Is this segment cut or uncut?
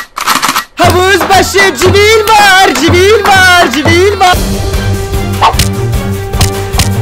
cut